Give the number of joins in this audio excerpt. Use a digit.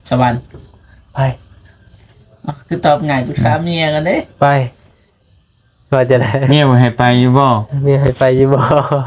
0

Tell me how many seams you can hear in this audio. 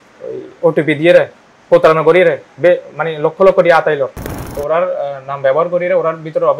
1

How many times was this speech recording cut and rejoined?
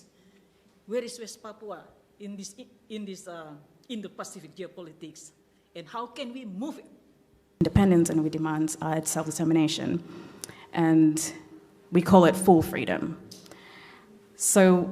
1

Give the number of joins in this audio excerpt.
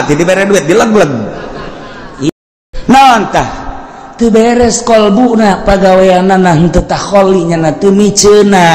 1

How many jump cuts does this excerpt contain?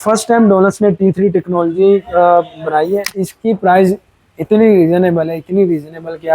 1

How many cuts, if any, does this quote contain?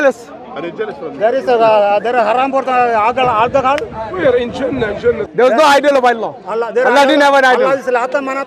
1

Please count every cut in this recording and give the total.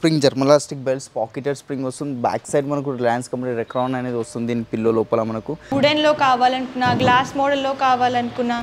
1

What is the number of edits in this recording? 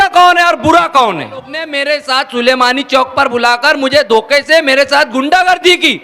1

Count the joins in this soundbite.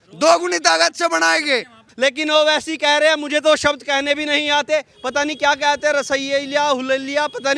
1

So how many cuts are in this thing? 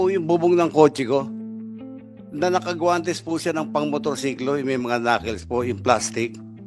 0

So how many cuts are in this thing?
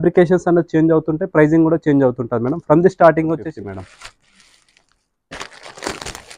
1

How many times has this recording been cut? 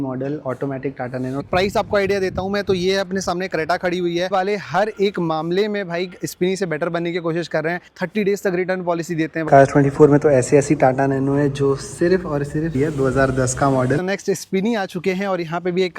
6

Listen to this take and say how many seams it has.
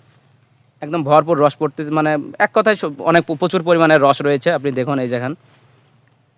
0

